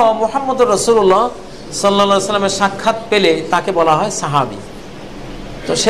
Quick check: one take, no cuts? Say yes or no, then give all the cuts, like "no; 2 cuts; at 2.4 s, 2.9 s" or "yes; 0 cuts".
yes; 0 cuts